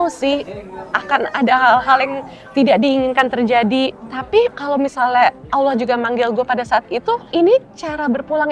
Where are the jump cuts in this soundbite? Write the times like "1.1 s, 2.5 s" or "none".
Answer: 4.4 s, 7.2 s